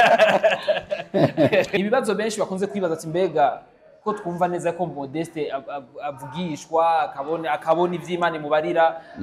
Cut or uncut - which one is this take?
cut